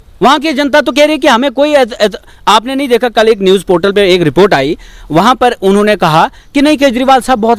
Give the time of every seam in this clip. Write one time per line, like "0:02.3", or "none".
none

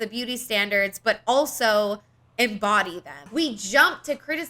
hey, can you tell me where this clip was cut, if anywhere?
0:03.2

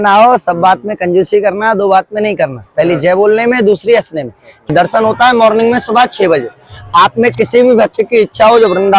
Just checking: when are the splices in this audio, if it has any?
0:04.7

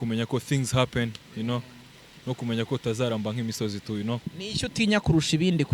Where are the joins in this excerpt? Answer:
0:04.2

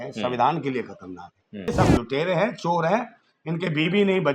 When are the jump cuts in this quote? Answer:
0:01.7

